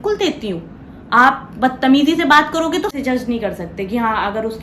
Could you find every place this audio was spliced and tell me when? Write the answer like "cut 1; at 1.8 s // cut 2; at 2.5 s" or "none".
cut 1; at 2.9 s